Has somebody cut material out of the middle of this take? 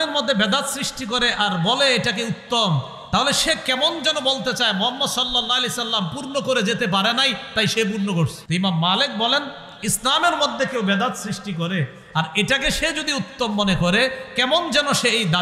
yes; 1 cut; at 8.4 s

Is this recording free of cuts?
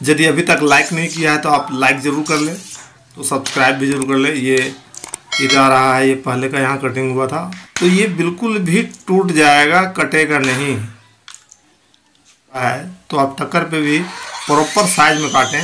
no; 3 cuts; at 3.1 s, 5.5 s, 12.6 s

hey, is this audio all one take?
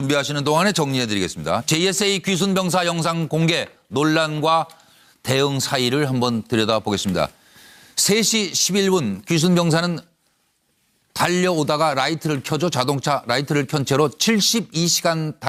yes; 0 cuts

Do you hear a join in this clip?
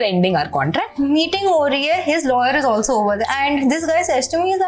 yes; 2 cuts; at 0.9 s, 3.2 s

